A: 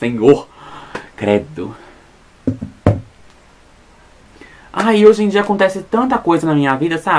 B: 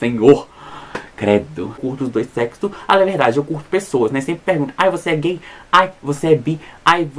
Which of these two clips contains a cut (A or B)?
B